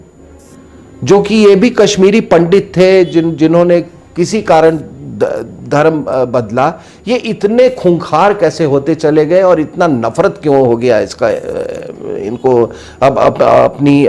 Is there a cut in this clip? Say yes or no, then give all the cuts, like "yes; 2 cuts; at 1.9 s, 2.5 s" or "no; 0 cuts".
no; 0 cuts